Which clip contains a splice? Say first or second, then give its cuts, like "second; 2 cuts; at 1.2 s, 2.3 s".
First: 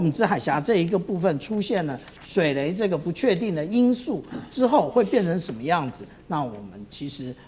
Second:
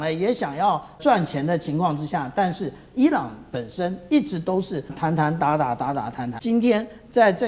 second; 3 cuts; at 1.0 s, 5.0 s, 6.3 s